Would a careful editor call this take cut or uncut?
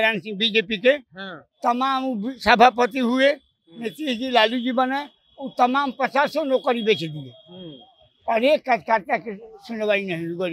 uncut